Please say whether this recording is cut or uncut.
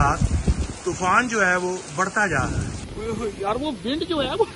cut